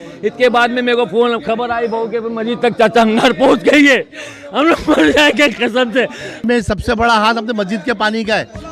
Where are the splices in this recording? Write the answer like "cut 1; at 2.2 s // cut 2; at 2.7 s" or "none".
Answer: cut 1; at 6.4 s